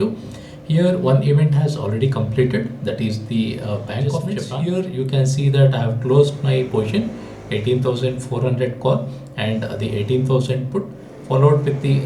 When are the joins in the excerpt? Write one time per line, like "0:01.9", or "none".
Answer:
0:04.4